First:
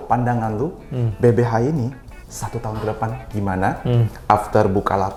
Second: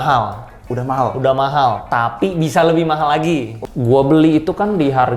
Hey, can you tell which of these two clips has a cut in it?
second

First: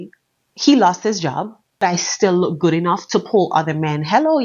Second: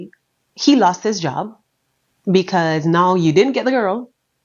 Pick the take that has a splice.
first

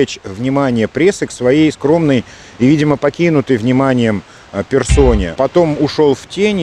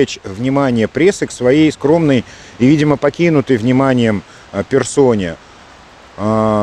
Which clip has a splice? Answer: first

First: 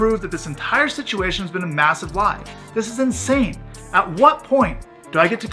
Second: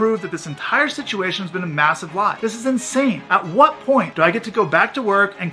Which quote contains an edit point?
second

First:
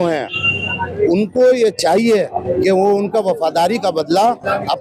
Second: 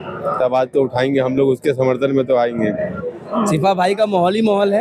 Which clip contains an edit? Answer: second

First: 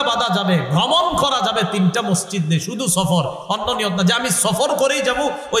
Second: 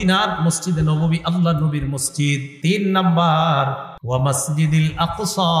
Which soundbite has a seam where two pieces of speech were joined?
second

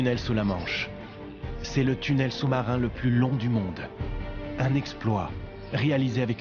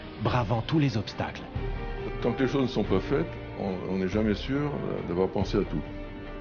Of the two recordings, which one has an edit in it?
first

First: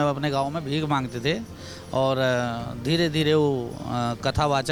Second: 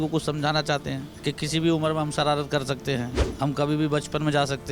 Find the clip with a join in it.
second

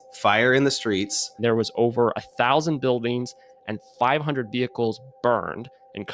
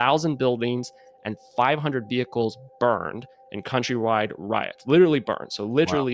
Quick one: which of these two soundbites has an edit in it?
first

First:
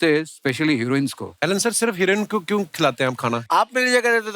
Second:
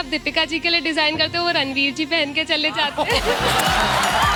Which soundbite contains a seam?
first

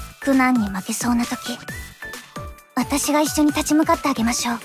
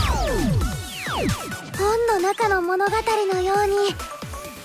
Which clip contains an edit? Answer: second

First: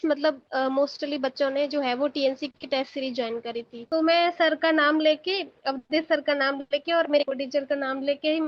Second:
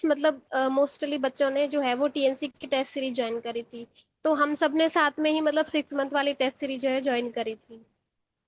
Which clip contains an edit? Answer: first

